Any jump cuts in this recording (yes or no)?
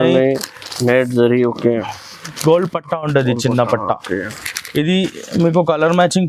no